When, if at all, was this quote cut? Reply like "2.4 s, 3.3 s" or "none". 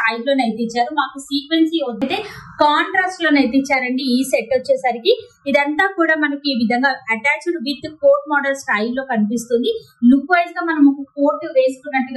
2.0 s